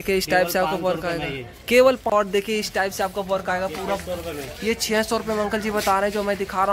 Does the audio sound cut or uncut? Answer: cut